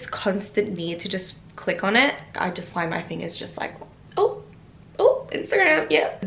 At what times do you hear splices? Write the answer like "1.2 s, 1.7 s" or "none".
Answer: none